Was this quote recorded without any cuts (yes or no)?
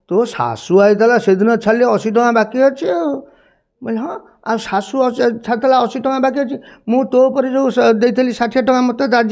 yes